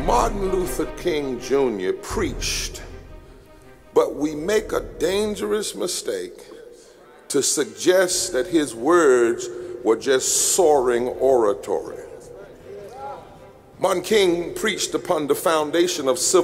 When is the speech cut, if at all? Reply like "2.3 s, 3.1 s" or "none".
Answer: 0.9 s